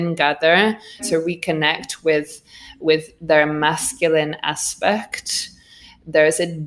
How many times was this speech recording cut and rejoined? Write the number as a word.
one